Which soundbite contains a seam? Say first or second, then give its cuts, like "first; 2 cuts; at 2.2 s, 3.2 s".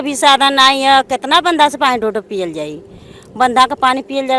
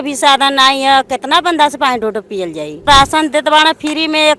second; 1 cut; at 2.9 s